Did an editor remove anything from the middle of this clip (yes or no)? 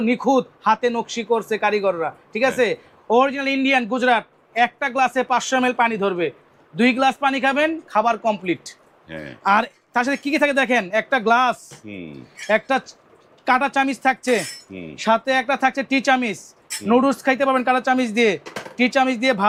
no